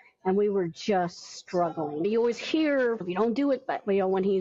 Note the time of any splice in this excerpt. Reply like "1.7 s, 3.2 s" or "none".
2.0 s, 3.0 s